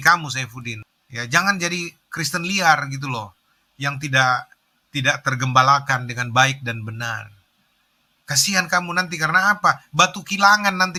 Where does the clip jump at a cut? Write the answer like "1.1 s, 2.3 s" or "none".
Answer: none